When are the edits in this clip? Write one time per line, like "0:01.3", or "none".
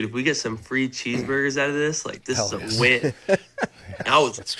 none